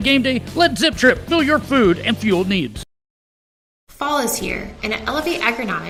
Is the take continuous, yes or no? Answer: yes